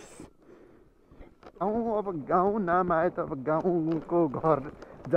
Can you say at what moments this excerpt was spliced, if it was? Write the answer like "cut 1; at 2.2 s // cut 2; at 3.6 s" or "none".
cut 1; at 1.6 s